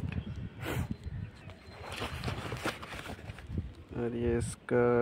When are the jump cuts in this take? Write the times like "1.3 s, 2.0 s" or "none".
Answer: none

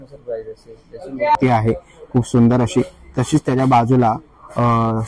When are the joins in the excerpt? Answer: 1.4 s

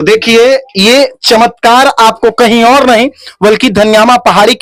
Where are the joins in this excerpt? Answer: none

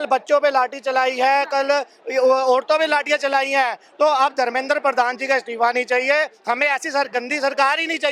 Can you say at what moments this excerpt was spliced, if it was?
none

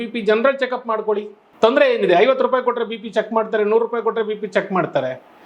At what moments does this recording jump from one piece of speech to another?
1.4 s

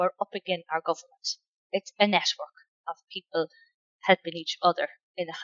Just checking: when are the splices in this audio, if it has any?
1.6 s

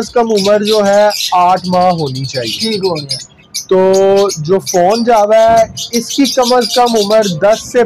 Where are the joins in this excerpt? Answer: none

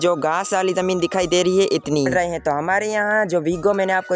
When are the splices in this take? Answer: 2.1 s

